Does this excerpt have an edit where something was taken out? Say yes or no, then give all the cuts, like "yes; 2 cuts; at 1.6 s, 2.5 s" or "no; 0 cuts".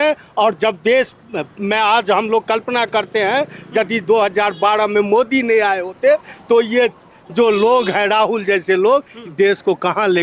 no; 0 cuts